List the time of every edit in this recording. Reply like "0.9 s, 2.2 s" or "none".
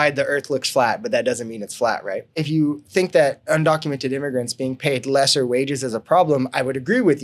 2.4 s